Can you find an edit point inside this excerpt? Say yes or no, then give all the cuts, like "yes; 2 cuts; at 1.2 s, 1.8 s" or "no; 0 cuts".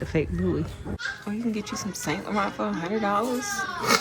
yes; 1 cut; at 1.0 s